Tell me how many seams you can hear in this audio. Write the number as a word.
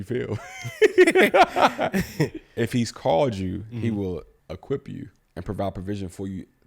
two